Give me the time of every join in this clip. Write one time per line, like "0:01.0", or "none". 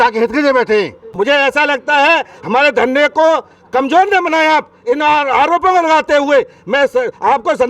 0:01.0